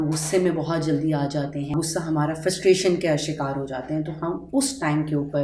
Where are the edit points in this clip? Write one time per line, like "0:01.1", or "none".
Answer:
0:01.7